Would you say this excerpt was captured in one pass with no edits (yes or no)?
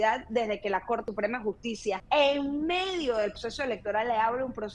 no